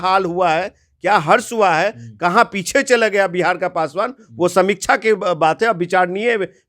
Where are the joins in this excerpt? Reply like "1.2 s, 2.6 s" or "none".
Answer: none